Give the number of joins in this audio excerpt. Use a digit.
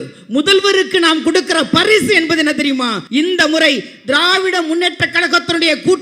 1